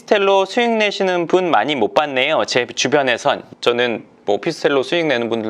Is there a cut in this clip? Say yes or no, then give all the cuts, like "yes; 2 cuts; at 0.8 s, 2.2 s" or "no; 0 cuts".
yes; 1 cut; at 3.5 s